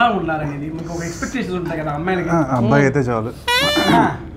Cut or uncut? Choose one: uncut